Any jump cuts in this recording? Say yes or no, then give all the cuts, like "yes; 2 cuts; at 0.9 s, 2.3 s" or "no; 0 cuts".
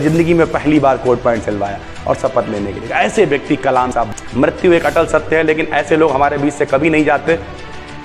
yes; 1 cut; at 3.9 s